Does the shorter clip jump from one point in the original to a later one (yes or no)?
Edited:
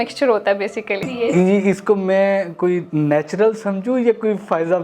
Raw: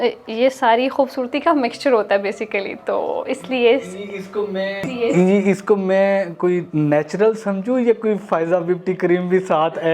yes